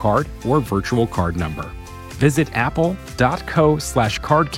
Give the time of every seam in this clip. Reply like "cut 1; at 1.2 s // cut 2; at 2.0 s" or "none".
none